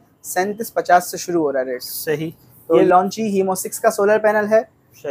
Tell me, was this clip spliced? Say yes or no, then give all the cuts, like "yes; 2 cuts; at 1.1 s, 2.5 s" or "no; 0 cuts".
yes; 1 cut; at 2.8 s